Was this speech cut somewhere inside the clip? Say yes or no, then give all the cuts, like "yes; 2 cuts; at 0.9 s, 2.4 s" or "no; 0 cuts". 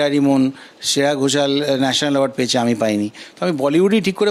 no; 0 cuts